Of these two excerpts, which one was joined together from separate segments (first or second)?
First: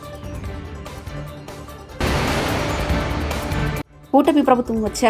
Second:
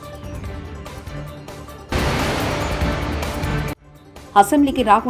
first